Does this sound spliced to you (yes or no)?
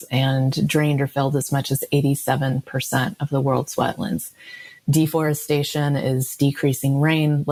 no